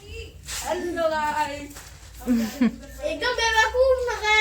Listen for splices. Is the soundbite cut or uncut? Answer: uncut